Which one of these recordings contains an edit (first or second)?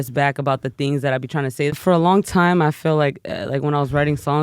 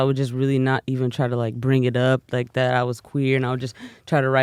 first